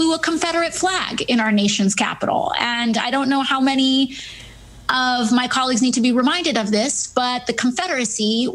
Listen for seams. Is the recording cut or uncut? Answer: cut